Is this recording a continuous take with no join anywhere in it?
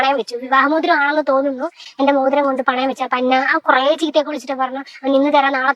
no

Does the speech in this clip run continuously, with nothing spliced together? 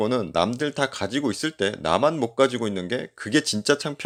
yes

